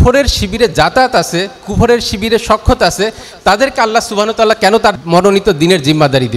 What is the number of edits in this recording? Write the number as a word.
one